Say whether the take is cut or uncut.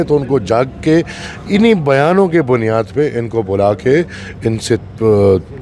uncut